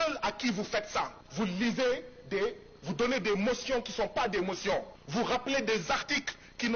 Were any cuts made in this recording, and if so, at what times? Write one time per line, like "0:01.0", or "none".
0:01.2
0:05.0